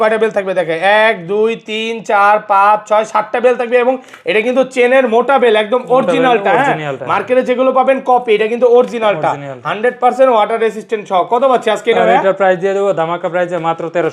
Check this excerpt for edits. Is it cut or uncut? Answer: uncut